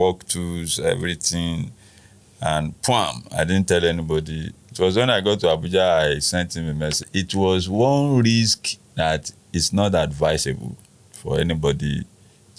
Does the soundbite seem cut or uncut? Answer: cut